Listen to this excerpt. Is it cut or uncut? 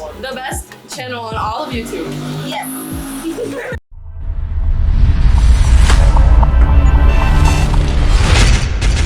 uncut